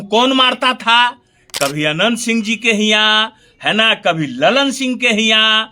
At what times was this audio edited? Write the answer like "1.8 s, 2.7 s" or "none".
none